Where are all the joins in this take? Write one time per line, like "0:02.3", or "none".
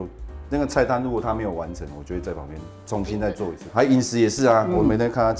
0:03.7